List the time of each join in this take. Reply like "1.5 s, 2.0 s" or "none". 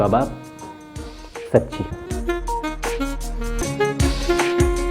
3.6 s